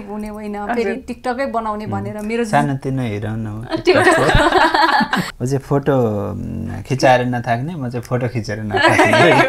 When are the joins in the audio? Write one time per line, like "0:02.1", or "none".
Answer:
0:05.3